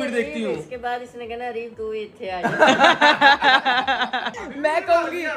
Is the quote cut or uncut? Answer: uncut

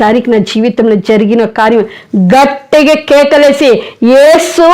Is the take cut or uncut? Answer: uncut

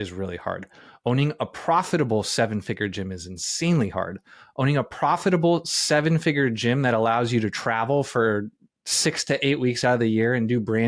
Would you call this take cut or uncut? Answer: uncut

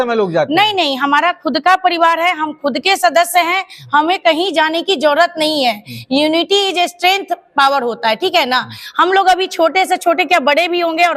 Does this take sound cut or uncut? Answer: uncut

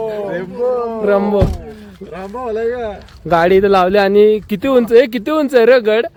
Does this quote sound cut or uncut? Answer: uncut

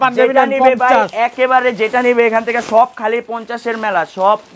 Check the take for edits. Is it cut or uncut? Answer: uncut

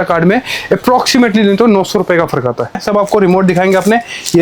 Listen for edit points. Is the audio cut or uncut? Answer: cut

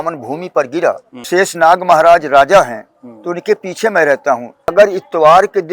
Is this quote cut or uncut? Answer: cut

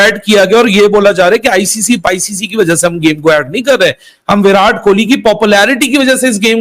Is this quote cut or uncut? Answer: uncut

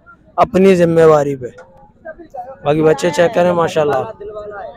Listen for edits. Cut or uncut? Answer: uncut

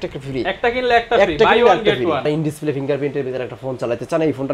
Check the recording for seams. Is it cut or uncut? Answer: cut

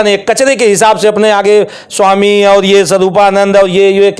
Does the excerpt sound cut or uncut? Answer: uncut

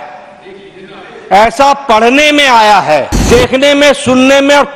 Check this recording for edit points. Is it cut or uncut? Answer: cut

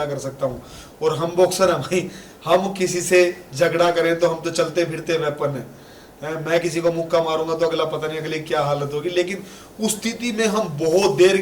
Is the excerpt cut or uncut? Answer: uncut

